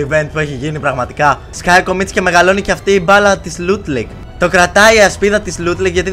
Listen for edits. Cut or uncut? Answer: cut